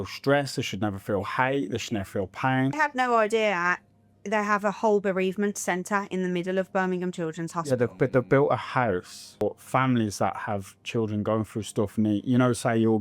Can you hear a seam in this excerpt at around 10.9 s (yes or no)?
no